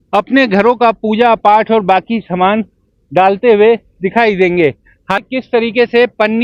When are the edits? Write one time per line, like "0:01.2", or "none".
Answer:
0:05.2

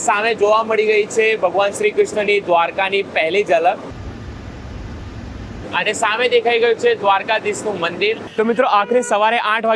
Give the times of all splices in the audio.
0:05.6
0:08.2

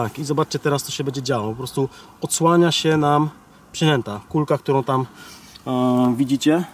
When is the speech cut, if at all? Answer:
none

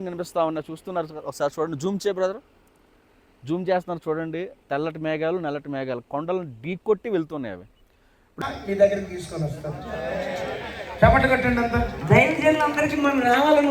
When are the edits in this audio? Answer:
0:08.4

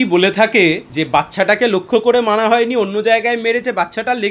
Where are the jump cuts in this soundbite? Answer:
0:00.9

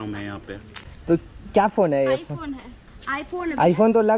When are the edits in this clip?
0:01.0

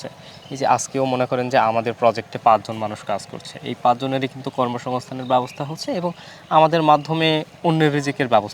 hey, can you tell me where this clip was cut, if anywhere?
0:07.5

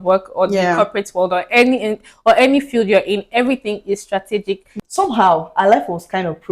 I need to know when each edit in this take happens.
0:04.8

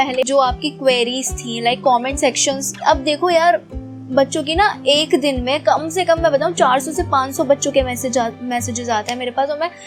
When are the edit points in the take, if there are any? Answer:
none

